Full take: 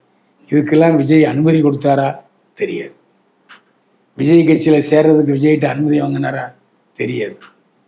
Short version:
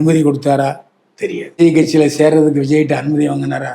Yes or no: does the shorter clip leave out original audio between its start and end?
yes